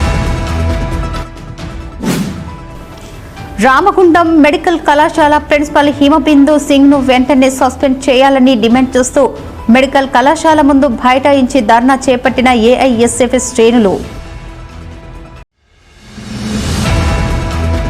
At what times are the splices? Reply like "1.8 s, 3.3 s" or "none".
none